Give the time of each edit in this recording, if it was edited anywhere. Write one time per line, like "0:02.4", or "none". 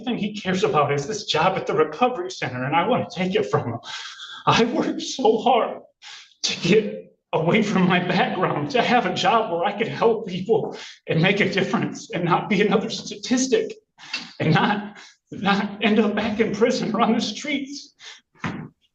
none